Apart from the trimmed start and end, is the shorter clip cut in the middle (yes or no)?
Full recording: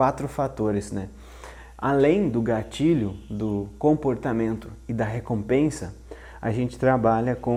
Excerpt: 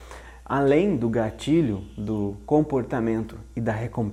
no